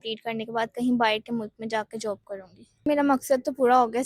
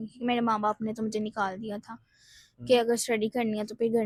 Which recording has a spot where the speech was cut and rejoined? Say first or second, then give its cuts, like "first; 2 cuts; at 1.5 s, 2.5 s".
first; 1 cut; at 2.9 s